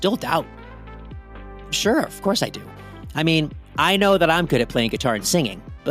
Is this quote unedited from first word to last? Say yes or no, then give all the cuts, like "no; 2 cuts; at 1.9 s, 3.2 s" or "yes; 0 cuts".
no; 1 cut; at 2.7 s